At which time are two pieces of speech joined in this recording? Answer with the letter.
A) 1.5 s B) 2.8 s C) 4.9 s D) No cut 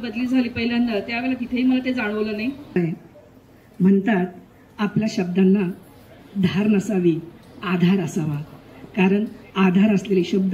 B